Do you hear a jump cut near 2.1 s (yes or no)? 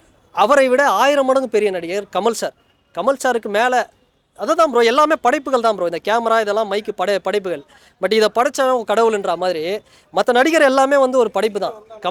no